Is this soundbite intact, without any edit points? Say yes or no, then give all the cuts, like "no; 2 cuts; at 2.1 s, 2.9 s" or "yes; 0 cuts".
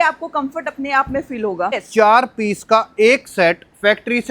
no; 1 cut; at 1.8 s